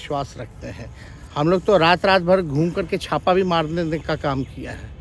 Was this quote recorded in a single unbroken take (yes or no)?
yes